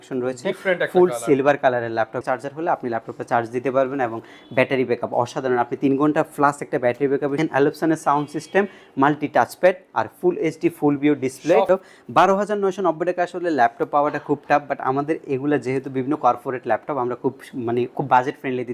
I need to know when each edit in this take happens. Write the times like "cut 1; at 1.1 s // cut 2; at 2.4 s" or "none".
cut 1; at 2.2 s // cut 2; at 7.3 s // cut 3; at 11.7 s